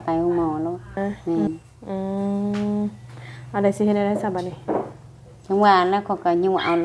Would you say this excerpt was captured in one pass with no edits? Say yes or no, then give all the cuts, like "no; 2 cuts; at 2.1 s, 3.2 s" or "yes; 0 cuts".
no; 1 cut; at 1.0 s